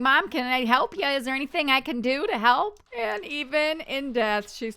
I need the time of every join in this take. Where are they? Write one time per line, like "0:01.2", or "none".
0:02.8